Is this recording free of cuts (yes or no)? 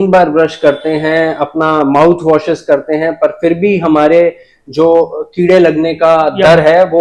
yes